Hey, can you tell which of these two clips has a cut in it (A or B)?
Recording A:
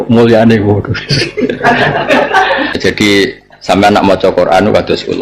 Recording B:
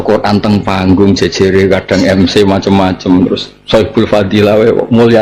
A